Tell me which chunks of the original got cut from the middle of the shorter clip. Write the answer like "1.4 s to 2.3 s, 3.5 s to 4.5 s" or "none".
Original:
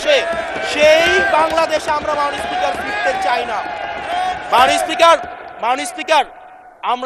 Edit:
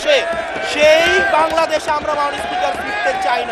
none